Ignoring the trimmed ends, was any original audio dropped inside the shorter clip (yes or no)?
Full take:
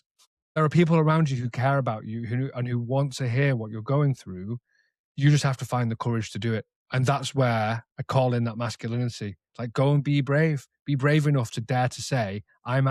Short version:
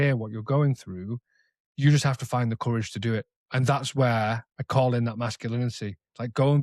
no